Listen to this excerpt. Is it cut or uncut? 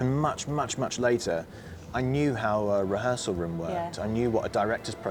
uncut